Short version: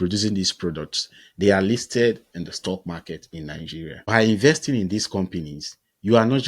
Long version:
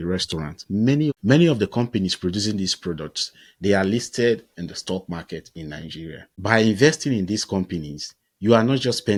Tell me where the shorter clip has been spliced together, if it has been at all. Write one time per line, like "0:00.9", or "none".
0:04.0